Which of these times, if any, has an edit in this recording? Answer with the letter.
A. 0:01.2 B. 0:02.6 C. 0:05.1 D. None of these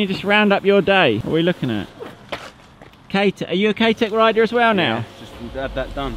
A